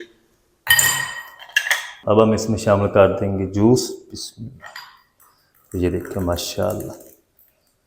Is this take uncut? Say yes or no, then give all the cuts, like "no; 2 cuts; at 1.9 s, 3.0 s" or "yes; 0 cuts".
no; 1 cut; at 1.9 s